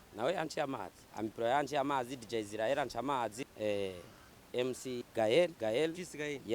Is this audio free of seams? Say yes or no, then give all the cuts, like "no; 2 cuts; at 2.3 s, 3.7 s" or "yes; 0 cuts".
no; 4 cuts; at 1.0 s, 3.4 s, 5.0 s, 5.5 s